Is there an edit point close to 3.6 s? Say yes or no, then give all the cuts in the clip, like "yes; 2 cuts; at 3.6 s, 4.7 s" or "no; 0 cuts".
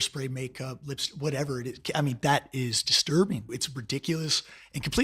yes; 1 cut; at 3.6 s